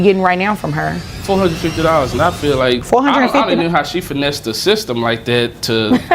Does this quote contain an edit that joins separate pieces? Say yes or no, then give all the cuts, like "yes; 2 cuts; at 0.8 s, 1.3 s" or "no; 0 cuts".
yes; 2 cuts; at 1.1 s, 2.8 s